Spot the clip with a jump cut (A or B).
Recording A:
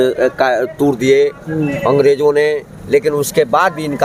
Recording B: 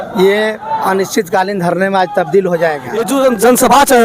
B